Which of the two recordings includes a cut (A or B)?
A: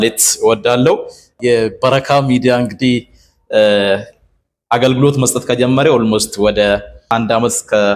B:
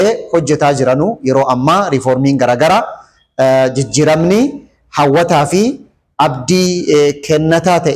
A